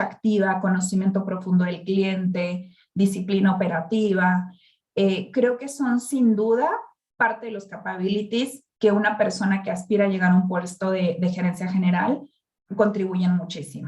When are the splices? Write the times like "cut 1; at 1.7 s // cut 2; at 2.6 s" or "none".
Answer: none

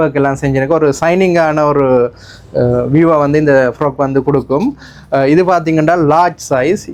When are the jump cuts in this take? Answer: none

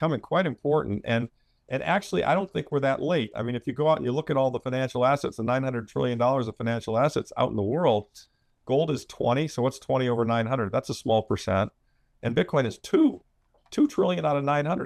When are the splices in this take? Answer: none

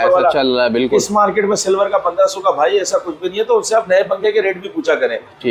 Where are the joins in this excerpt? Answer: none

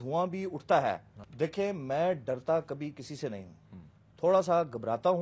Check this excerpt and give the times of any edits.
cut 1; at 1.2 s

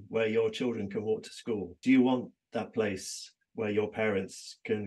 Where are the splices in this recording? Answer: cut 1; at 1.7 s

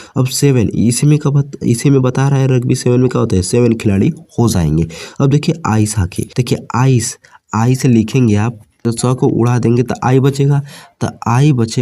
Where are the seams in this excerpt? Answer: cut 1; at 6.3 s // cut 2; at 8.8 s

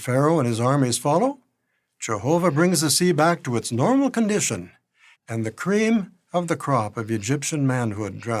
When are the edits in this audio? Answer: none

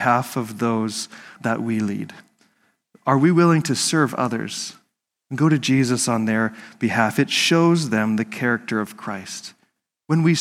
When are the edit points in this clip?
cut 1; at 1.3 s

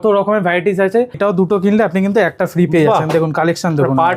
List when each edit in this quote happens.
cut 1; at 1.2 s

